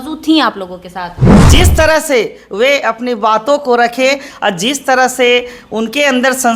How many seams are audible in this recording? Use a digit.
1